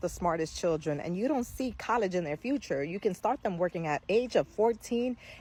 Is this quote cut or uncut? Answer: uncut